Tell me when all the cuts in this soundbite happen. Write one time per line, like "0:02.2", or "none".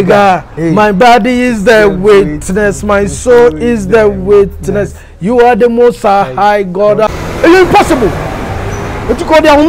0:07.2